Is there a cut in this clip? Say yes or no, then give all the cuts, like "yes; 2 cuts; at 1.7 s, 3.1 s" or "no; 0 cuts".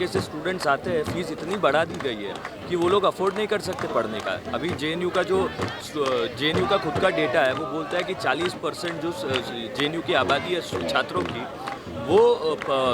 no; 0 cuts